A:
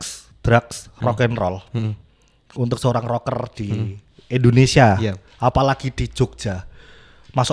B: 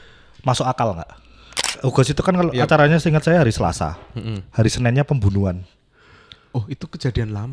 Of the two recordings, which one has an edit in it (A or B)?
B